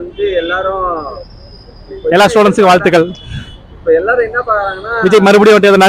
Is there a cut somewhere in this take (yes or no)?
no